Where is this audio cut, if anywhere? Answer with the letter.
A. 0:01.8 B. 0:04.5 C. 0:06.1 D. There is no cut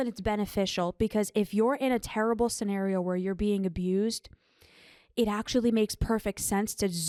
D